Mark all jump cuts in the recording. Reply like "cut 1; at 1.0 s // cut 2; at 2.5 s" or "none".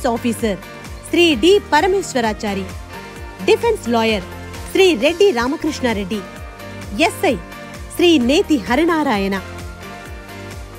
cut 1; at 9.4 s